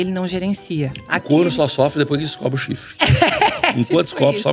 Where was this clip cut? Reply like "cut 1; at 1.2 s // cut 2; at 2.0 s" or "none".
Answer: none